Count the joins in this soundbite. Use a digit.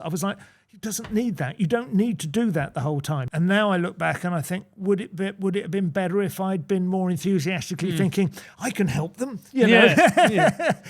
1